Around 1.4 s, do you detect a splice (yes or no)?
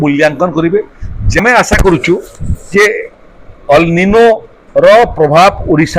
yes